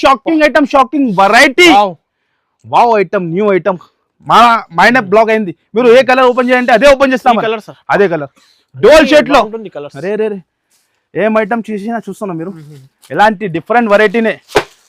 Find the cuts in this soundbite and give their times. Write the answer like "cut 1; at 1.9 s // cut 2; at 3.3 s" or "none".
none